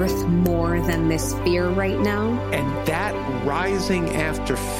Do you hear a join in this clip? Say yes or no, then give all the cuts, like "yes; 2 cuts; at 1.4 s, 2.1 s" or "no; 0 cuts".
no; 0 cuts